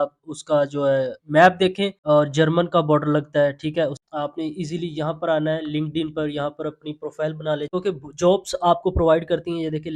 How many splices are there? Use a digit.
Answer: 3